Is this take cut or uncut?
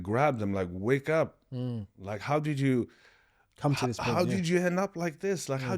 uncut